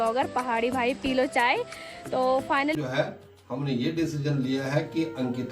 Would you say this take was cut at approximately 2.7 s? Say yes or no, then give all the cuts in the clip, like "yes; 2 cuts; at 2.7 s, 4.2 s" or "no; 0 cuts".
yes; 1 cut; at 2.7 s